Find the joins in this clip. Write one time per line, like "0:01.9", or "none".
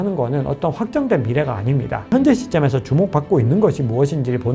0:02.1